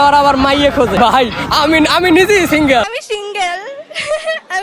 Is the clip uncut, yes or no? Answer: no